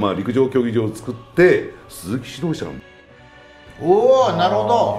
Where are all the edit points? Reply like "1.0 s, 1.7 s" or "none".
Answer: none